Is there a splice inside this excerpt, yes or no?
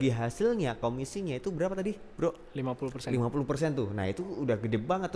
no